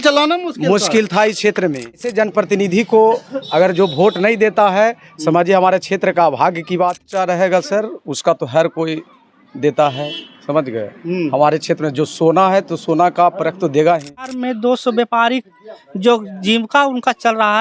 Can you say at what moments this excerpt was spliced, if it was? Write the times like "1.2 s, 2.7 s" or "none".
2.1 s, 7.0 s, 14.3 s